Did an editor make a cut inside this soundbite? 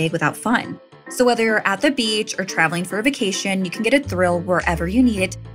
no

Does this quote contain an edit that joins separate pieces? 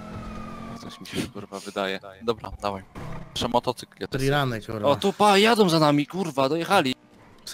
yes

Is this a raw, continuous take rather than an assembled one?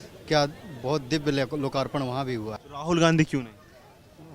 no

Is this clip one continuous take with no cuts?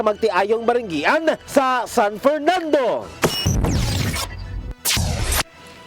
no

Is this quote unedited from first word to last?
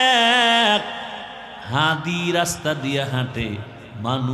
yes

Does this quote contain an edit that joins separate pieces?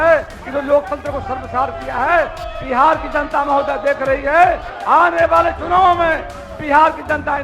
no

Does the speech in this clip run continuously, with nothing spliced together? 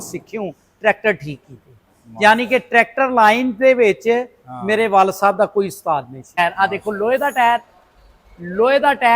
no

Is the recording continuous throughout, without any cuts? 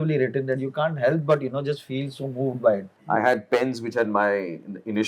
no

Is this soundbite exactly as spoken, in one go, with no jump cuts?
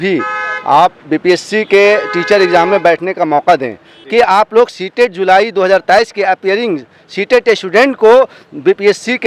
no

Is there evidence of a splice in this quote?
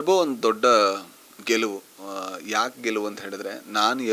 no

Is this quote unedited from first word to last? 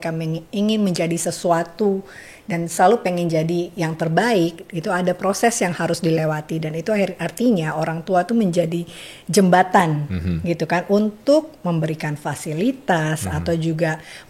yes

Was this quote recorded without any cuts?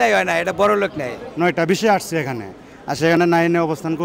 no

